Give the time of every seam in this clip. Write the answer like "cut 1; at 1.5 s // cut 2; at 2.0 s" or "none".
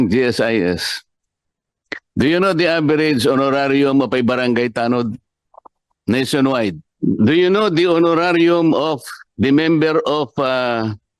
cut 1; at 6.9 s

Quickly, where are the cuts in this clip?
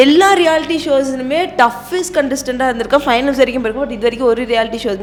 none

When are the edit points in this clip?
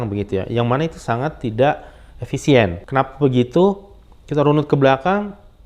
cut 1; at 2.8 s

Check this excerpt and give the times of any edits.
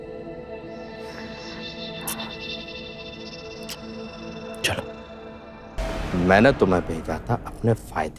cut 1; at 5.8 s

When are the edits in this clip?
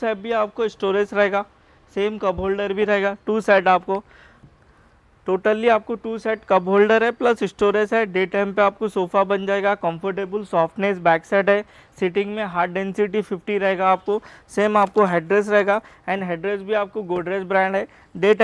none

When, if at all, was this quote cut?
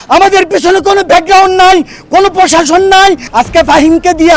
cut 1; at 3.2 s

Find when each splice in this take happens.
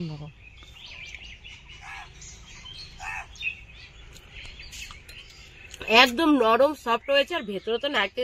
cut 1; at 1.6 s // cut 2; at 5.4 s

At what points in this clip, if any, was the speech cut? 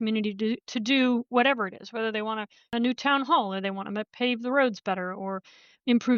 cut 1; at 2.7 s

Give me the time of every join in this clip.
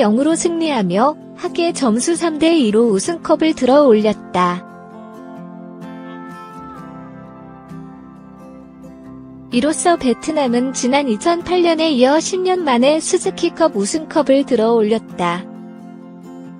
none

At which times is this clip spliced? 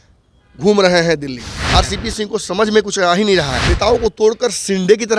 cut 1; at 1.5 s // cut 2; at 3.6 s

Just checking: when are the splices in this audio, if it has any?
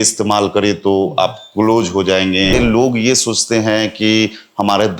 cut 1; at 2.5 s

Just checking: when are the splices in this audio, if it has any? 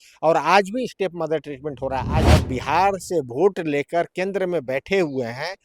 cut 1; at 2.3 s

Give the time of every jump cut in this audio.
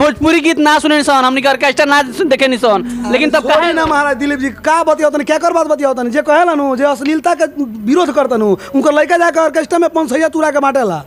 none

